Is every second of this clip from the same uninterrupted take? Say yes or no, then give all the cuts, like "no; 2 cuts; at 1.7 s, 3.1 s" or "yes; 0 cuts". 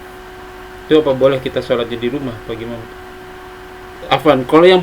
no; 1 cut; at 3.9 s